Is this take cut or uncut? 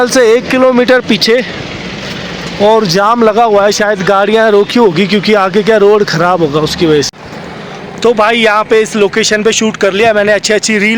cut